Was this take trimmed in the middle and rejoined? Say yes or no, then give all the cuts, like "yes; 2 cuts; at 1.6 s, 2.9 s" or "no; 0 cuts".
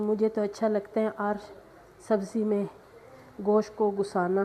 no; 0 cuts